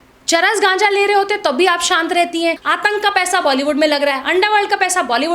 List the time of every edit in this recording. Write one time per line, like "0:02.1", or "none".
0:02.7